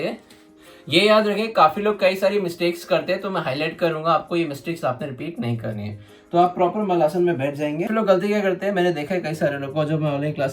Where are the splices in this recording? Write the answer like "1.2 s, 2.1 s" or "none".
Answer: 7.9 s